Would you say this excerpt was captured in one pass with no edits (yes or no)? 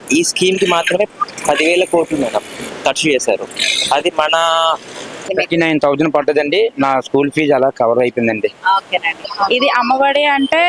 no